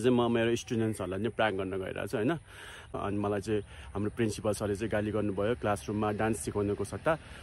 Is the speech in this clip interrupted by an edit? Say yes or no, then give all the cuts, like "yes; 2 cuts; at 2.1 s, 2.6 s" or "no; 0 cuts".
yes; 1 cut; at 3.0 s